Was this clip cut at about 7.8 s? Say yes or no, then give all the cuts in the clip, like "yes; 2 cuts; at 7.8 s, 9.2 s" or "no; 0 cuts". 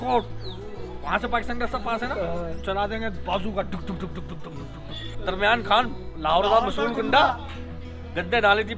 no; 1 cut; at 5.1 s